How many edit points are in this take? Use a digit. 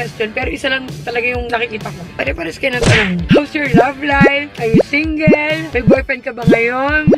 1